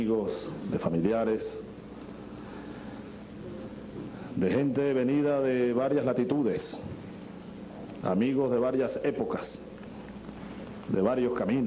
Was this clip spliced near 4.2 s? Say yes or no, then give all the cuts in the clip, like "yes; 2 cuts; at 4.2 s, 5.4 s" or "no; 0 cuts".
no; 1 cut; at 6.7 s